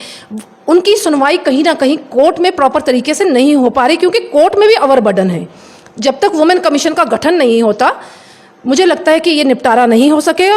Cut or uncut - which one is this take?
uncut